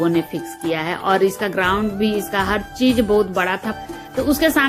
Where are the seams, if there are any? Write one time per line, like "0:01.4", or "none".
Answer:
0:03.7